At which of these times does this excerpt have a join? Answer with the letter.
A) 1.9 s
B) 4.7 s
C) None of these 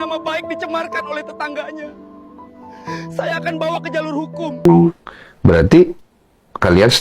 B